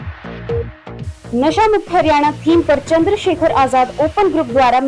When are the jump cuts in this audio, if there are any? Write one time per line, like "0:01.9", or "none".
0:01.2